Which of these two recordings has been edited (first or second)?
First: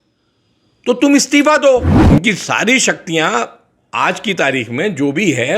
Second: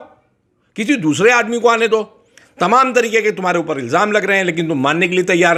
first